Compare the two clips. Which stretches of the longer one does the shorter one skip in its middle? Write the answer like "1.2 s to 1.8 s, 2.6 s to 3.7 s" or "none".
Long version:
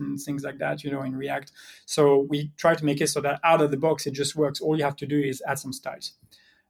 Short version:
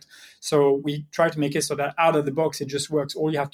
none